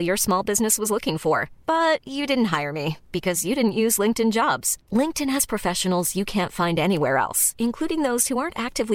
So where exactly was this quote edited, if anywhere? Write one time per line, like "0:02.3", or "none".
none